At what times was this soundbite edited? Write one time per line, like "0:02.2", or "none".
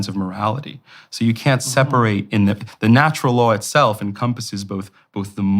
none